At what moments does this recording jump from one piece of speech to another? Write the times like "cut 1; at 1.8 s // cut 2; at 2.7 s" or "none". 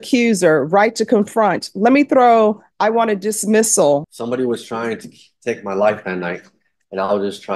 cut 1; at 4.1 s